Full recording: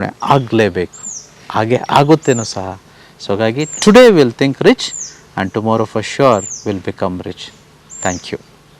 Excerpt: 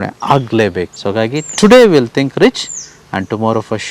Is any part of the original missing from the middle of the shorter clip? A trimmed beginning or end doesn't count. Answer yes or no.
yes